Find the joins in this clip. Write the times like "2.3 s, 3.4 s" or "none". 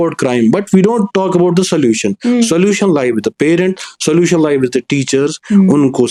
none